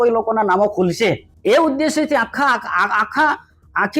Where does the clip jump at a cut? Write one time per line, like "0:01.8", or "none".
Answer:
0:01.3